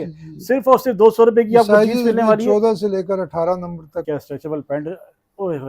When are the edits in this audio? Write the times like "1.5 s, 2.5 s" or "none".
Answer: 4.0 s